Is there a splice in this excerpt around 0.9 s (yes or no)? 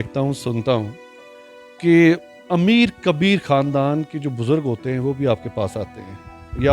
no